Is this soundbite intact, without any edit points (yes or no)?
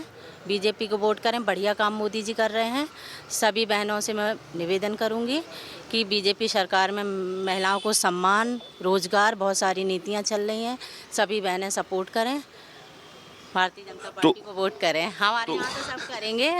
yes